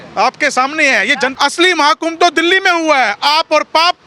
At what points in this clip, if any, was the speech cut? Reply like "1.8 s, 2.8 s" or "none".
1.3 s